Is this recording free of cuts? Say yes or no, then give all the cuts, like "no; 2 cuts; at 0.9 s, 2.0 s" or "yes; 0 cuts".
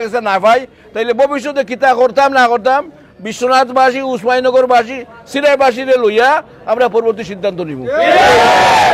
yes; 0 cuts